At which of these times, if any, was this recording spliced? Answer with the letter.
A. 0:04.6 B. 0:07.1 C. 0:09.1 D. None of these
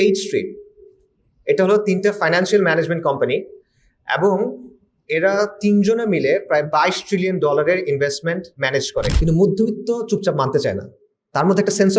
C